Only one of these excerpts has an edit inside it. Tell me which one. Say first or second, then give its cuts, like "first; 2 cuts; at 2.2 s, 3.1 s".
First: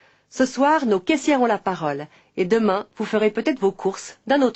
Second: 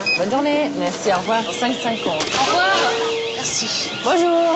second; 1 cut; at 3.2 s